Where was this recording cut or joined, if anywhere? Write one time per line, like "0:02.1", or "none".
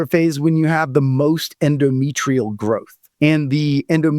0:03.0